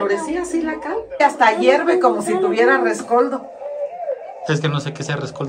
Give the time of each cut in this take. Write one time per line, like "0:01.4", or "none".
0:01.2

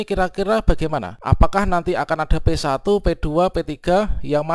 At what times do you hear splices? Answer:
0:01.1

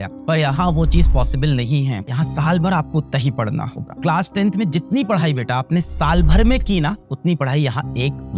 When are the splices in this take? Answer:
0:02.0
0:04.0

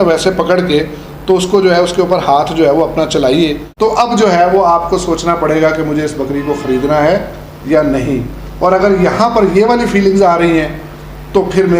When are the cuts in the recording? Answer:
0:03.6

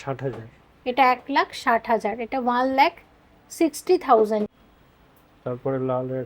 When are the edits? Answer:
0:04.6

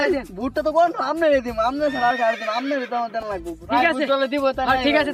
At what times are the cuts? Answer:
none

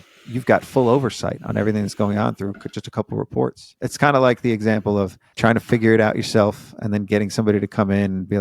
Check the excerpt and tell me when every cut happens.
0:03.8

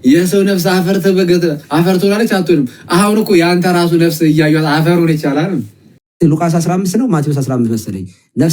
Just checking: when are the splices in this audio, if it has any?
0:06.0

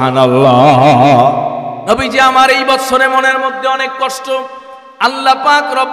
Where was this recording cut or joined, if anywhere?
0:01.7

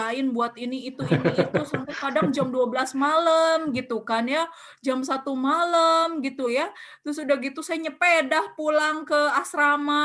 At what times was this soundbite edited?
none

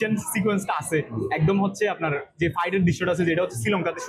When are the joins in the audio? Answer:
none

